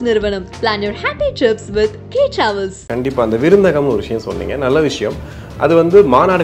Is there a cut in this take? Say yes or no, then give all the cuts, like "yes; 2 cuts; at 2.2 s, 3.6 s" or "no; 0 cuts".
yes; 1 cut; at 2.8 s